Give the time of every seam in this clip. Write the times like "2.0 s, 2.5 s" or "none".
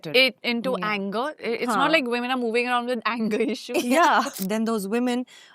4.3 s